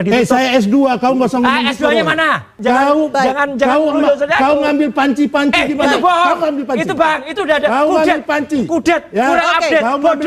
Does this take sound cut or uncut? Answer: cut